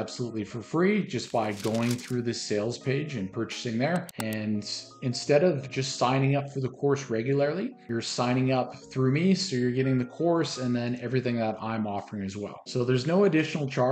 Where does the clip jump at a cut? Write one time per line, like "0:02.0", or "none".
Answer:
0:04.1